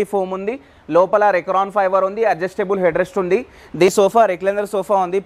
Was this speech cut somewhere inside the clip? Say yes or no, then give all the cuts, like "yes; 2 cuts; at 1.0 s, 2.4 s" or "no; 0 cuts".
yes; 1 cut; at 3.9 s